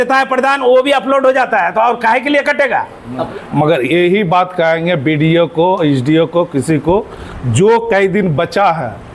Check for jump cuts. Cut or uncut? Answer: cut